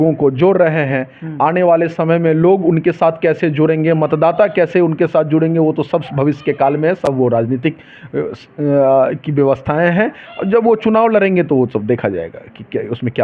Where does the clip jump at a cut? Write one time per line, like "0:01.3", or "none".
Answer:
none